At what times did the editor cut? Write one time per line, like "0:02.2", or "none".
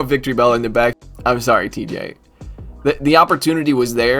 0:01.0